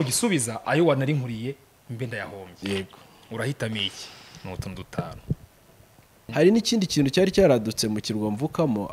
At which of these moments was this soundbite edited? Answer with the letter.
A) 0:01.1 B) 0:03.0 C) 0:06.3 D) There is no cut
C